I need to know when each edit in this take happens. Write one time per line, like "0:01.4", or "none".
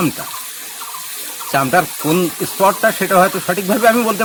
none